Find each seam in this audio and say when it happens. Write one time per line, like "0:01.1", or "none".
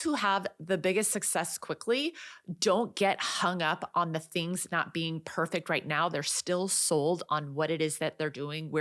none